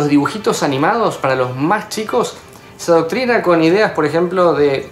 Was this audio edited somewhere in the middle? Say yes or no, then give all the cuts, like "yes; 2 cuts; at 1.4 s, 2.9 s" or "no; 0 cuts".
no; 0 cuts